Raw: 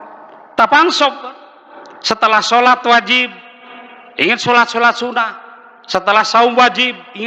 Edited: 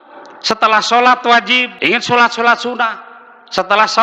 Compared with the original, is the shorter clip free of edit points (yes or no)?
no